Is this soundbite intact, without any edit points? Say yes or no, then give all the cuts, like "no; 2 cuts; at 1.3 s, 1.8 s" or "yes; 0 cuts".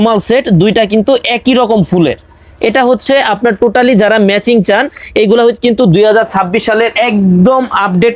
yes; 0 cuts